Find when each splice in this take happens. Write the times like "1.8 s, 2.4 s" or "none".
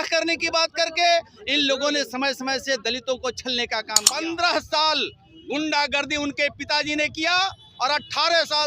4.0 s